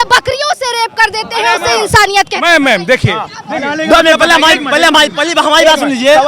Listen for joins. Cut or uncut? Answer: uncut